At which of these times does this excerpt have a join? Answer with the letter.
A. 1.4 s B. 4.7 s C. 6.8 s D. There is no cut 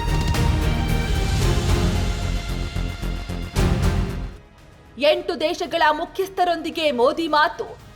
D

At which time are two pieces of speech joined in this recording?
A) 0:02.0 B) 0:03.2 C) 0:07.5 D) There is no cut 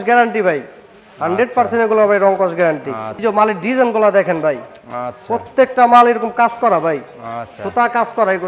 B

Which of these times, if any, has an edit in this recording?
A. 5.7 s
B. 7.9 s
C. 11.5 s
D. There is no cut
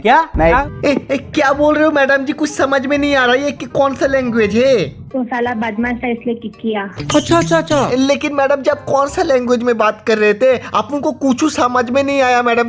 B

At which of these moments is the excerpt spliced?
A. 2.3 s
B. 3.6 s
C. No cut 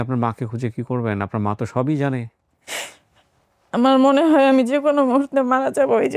A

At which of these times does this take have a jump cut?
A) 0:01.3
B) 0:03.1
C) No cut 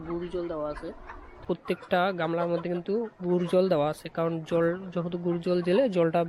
A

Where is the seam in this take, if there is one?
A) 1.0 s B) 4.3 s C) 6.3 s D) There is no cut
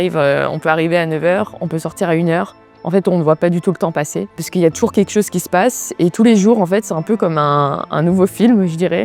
D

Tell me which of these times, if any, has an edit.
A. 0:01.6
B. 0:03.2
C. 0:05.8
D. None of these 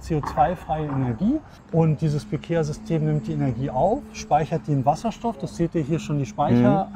A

